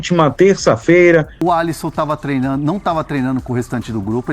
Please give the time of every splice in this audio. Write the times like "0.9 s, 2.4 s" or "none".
1.3 s